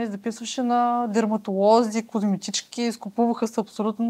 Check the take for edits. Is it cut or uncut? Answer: uncut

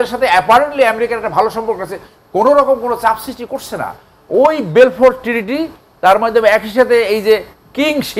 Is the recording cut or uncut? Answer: uncut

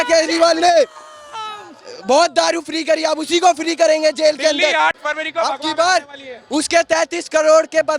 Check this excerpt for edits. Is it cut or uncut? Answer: uncut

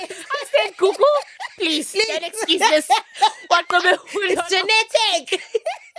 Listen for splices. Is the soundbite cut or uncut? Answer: uncut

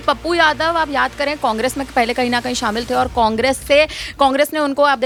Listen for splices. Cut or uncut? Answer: uncut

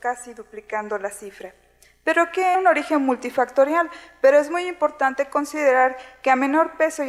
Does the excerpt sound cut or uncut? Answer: uncut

